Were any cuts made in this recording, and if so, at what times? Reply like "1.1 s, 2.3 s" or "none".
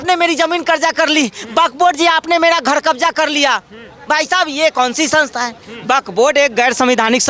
none